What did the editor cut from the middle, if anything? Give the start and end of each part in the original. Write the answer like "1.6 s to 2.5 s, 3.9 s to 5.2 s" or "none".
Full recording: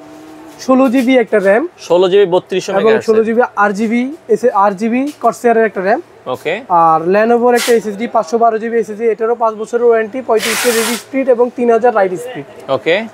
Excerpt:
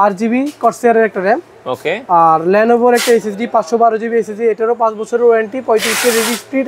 none